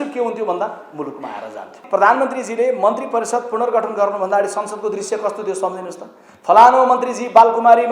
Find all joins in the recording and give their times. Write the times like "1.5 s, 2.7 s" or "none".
1.8 s